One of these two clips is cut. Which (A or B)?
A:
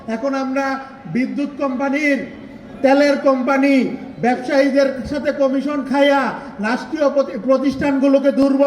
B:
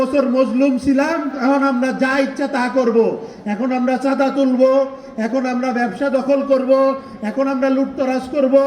B